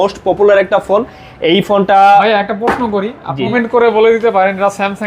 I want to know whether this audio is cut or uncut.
cut